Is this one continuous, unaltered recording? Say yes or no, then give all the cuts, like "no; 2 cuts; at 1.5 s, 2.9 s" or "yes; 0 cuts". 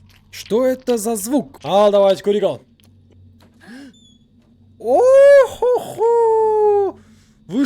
no; 1 cut; at 1.6 s